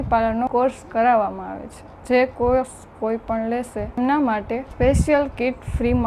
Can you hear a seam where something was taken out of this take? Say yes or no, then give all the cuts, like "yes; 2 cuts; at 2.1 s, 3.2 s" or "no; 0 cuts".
no; 0 cuts